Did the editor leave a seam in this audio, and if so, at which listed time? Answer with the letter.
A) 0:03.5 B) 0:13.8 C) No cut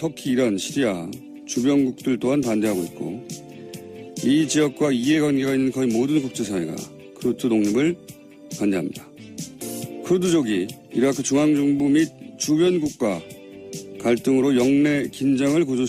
C